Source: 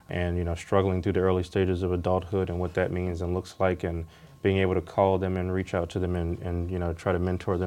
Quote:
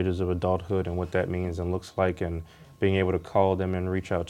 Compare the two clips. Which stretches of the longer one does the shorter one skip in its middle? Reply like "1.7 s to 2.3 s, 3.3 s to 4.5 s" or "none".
none